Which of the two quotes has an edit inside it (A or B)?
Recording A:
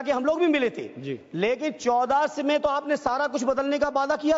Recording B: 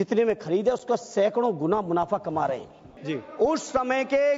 B